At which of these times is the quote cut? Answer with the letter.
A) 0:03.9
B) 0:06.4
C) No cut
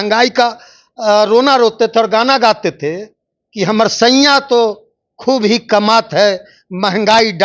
C